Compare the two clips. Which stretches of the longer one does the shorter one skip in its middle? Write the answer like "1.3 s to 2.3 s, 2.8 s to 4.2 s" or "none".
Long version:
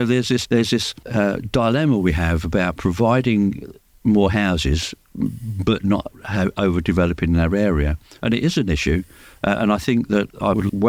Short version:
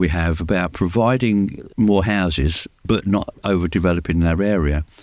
3.7 s to 3.9 s, 5.0 s to 5.5 s, 6.2 s to 6.5 s